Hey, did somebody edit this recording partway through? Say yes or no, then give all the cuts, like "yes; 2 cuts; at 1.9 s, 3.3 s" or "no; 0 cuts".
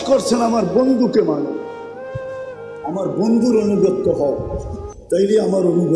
yes; 2 cuts; at 1.6 s, 2.8 s